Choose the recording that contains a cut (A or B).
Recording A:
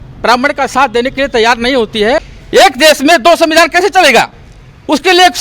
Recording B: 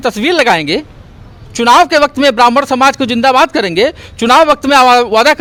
A